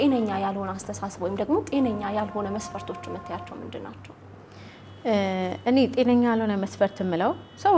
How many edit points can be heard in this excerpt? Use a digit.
0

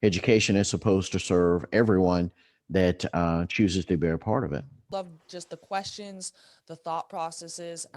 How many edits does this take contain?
1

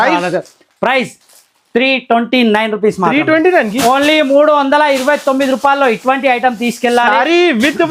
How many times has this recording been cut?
0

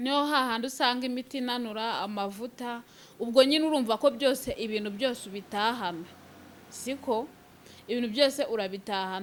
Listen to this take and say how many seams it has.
0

